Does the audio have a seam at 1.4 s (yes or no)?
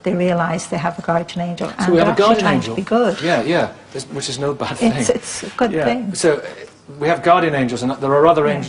no